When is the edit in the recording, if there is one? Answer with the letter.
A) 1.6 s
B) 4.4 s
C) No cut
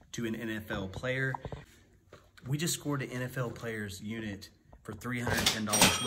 A